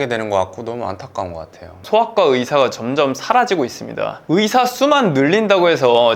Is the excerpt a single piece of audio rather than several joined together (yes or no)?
no